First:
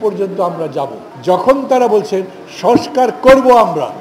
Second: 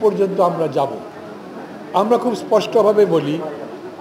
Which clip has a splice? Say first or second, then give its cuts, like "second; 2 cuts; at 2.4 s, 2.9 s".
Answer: first; 1 cut; at 1.1 s